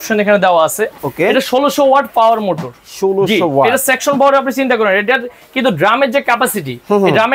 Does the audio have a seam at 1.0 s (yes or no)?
yes